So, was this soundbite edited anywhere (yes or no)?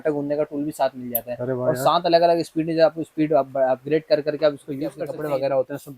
yes